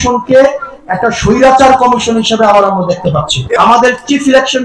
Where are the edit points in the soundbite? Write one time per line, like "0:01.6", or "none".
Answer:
0:03.6